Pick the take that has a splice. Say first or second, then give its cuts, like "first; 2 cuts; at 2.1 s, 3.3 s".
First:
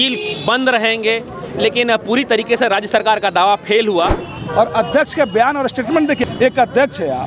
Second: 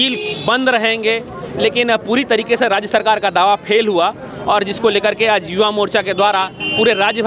first; 2 cuts; at 4.3 s, 6.2 s